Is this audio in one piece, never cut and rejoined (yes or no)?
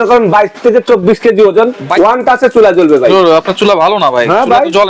no